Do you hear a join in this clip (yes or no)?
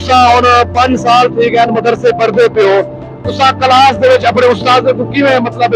no